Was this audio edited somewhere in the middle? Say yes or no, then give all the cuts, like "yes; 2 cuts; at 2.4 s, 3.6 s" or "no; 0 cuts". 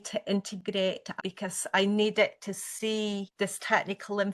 yes; 2 cuts; at 1.2 s, 3.3 s